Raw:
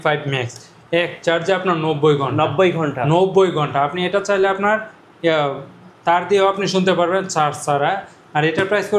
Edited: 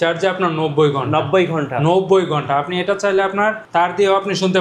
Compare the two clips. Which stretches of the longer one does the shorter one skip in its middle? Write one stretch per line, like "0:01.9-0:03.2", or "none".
0:04.9-0:05.9